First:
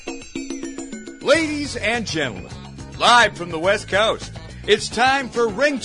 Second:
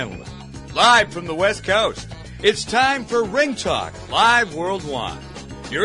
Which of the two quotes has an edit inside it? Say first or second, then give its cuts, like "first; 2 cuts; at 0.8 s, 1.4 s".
first; 1 cut; at 1.2 s